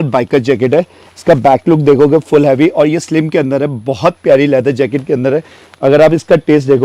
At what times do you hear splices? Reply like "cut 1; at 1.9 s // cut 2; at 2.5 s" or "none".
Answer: none